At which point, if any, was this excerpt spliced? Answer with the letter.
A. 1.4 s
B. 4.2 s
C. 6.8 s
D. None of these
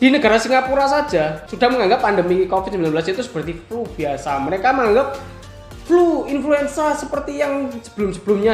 A